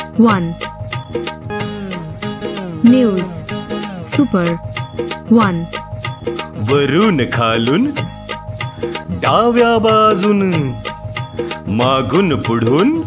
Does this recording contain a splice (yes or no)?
yes